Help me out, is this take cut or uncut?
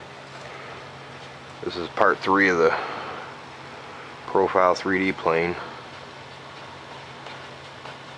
uncut